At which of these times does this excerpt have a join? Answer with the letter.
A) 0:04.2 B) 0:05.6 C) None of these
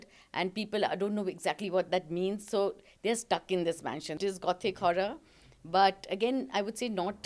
A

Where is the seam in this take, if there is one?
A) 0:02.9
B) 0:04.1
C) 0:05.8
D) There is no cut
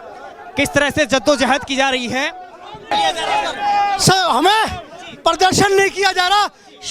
A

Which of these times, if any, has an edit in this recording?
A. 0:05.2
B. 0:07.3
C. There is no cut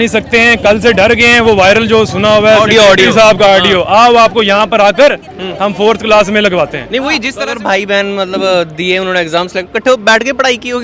B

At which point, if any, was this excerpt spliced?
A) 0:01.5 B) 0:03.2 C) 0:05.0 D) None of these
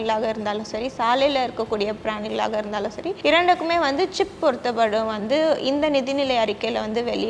B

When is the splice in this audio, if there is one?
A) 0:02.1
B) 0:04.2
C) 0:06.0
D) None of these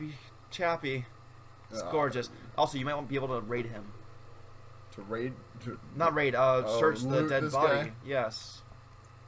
A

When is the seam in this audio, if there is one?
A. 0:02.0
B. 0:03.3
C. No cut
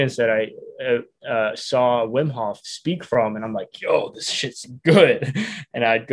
C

